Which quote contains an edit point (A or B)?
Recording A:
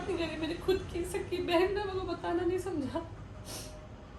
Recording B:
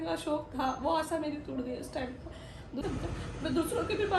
B